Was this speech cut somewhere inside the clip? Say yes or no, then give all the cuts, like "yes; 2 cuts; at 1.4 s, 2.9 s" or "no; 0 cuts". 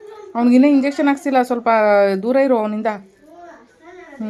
no; 0 cuts